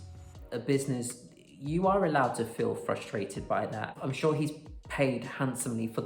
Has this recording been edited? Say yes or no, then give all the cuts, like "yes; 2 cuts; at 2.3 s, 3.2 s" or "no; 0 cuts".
yes; 1 cut; at 3.9 s